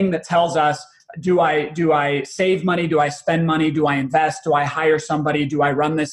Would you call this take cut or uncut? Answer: uncut